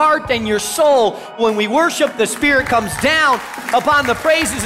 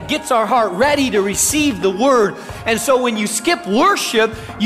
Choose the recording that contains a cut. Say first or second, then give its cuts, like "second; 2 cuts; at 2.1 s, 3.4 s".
first; 1 cut; at 1.4 s